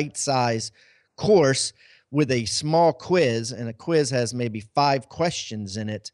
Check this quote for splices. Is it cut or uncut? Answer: uncut